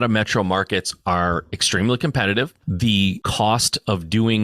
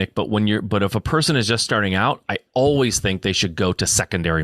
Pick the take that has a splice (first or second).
first